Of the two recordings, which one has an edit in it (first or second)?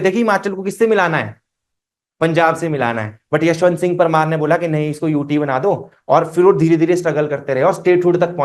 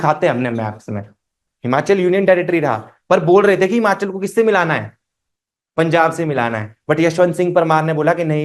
second